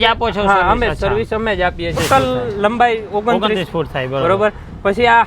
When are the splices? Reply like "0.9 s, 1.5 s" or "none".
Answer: 2.0 s